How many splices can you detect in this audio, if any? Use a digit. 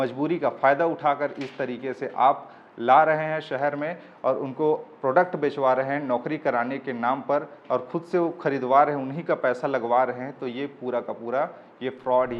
0